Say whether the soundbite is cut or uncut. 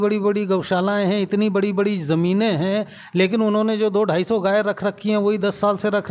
uncut